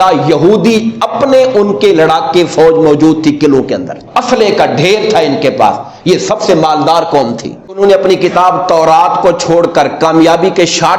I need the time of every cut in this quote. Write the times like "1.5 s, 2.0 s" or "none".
4.0 s, 7.7 s